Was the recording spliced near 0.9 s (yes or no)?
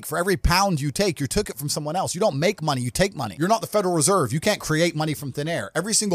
no